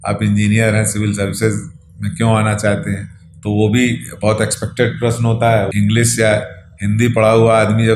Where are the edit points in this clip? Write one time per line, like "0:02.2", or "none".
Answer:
0:05.7